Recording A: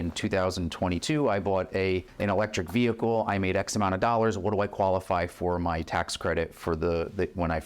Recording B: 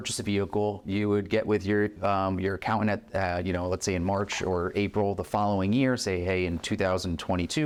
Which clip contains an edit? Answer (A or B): A